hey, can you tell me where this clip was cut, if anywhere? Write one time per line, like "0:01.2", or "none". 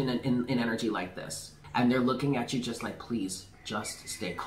0:01.6